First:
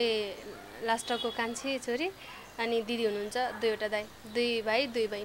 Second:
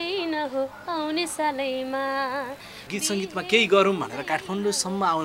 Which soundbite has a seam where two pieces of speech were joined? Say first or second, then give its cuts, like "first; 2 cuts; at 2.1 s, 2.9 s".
second; 1 cut; at 2.9 s